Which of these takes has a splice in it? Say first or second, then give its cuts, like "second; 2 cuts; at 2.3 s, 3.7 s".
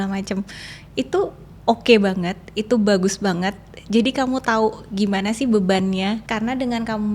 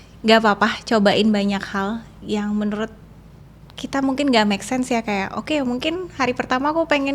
first; 1 cut; at 6.2 s